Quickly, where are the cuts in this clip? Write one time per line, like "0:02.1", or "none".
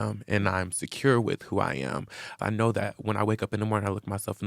0:02.4